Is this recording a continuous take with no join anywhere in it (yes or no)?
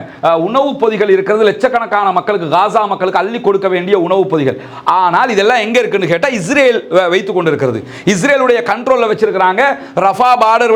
yes